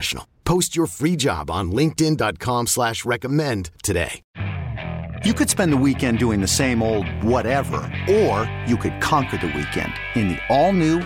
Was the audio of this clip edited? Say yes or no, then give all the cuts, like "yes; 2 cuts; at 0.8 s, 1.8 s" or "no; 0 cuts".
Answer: yes; 1 cut; at 4.2 s